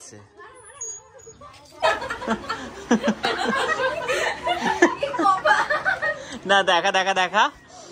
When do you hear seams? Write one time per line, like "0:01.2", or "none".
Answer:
0:01.7